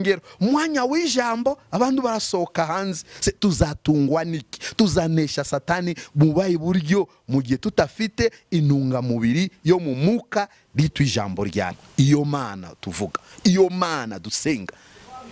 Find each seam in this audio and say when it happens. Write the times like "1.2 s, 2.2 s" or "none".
11.8 s